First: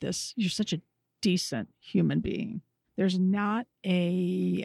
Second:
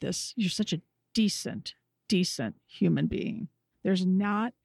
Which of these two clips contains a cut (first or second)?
first